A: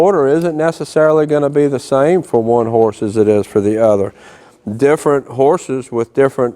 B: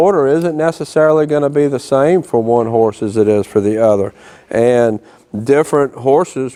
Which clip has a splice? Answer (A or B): A